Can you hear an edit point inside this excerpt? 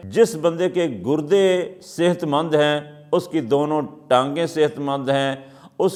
no; 0 cuts

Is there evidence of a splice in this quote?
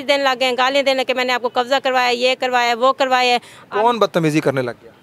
no; 0 cuts

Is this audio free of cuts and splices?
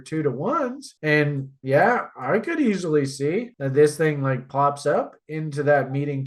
yes; 0 cuts

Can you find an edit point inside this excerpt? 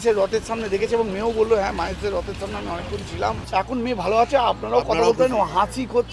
yes; 1 cut; at 3.5 s

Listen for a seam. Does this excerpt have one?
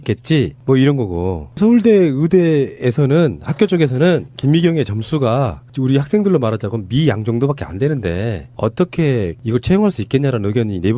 no; 0 cuts

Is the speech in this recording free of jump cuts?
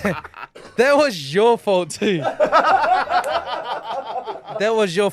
yes; 0 cuts

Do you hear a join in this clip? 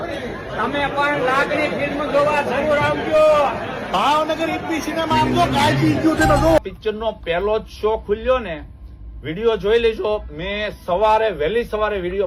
yes; 1 cut; at 6.6 s

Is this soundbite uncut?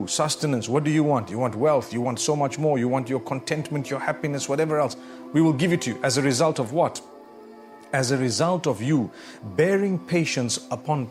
yes; 0 cuts

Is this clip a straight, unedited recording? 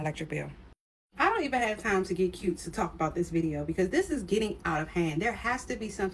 yes; 0 cuts

